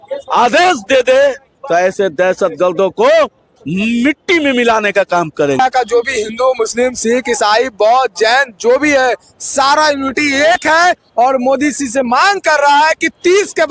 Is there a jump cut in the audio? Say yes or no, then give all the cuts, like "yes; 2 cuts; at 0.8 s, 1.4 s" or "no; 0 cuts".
yes; 1 cut; at 5.6 s